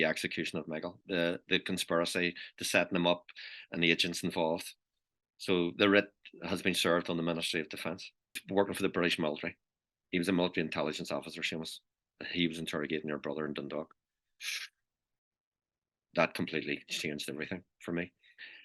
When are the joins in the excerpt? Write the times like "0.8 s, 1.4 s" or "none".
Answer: 8.4 s